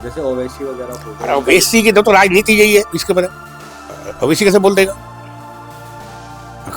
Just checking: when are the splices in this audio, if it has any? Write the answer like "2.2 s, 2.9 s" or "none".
none

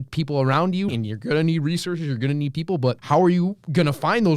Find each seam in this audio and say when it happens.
0.9 s, 3.0 s

